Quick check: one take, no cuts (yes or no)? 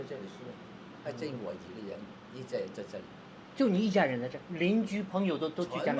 yes